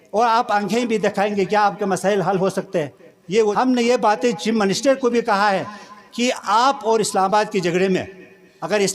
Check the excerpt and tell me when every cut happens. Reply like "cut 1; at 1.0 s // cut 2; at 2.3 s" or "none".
cut 1; at 3.5 s